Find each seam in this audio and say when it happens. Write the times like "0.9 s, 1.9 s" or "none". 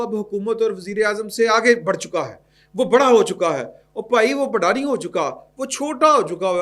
none